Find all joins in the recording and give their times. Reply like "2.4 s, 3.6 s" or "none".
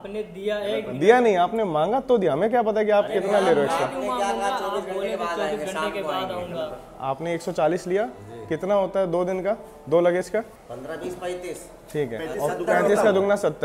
10.6 s